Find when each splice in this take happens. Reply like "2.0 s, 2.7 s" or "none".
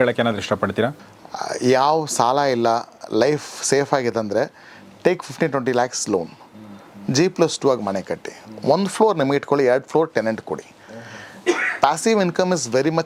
1.0 s